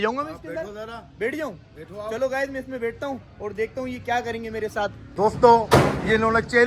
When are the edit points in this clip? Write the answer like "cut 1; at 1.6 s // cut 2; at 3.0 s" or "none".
cut 1; at 5.0 s